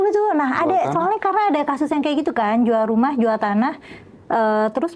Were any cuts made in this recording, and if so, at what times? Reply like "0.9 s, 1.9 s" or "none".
none

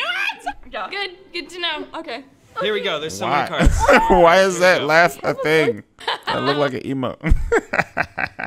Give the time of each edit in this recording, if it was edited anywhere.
3.0 s

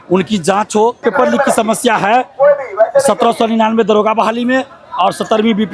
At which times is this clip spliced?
1.0 s

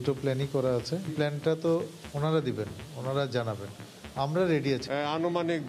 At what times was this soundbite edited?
1.1 s, 4.8 s

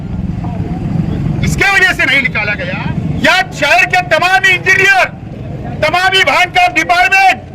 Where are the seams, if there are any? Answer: 2.5 s

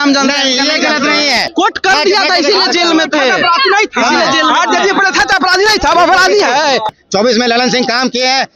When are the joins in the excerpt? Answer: 1.5 s, 7.0 s

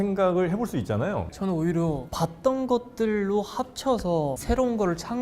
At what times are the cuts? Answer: 1.3 s

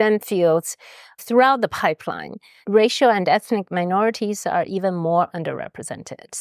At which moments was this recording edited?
1.2 s

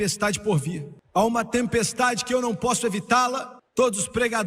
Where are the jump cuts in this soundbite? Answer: 0.9 s, 3.5 s

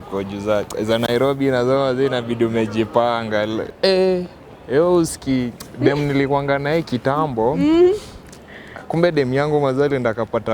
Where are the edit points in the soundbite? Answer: 3.7 s

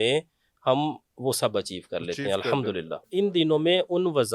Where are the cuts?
3.1 s

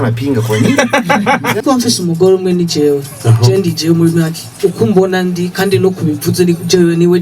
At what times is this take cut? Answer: 1.6 s

